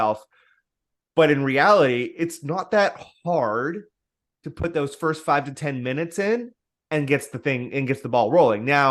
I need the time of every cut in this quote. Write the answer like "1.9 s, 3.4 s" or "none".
none